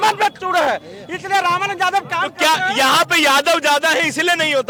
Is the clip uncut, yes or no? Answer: yes